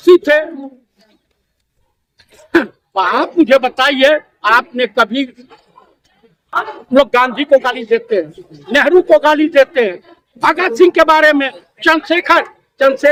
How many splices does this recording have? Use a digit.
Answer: 0